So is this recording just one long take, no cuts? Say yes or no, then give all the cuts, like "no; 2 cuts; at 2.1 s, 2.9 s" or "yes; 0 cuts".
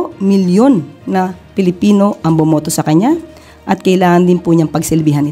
yes; 0 cuts